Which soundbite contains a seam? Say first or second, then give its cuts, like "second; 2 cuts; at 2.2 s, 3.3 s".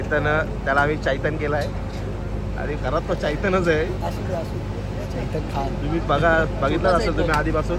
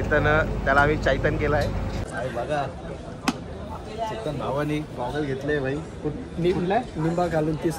second; 1 cut; at 2.0 s